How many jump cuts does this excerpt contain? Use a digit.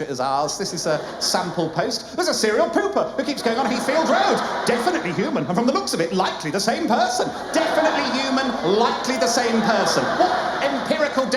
0